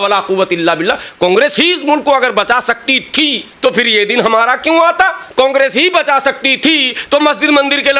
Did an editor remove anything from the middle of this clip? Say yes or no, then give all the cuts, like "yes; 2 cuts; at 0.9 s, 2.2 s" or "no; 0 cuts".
yes; 2 cuts; at 3.4 s, 5.2 s